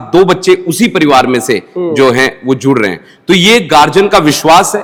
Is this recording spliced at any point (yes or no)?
no